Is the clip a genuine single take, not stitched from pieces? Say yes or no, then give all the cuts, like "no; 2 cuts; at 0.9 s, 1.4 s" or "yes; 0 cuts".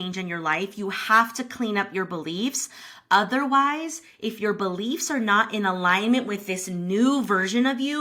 yes; 0 cuts